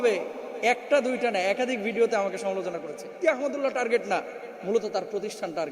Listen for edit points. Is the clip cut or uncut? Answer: cut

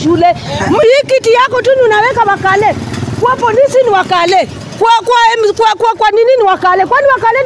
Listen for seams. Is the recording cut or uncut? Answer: uncut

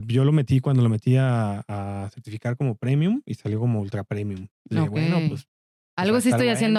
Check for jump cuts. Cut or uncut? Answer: uncut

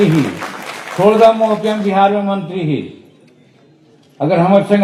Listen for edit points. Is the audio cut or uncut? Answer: uncut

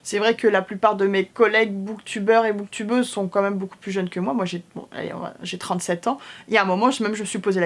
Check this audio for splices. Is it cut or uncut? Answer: uncut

